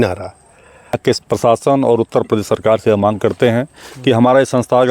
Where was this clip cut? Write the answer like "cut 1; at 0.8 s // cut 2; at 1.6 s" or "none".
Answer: cut 1; at 1.0 s